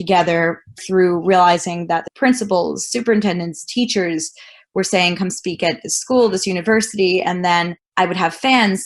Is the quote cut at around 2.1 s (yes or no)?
yes